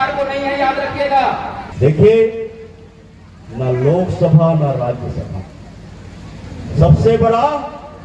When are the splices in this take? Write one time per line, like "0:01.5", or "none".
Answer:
0:01.6